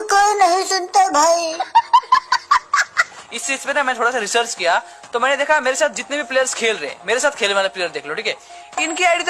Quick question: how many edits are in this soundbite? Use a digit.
0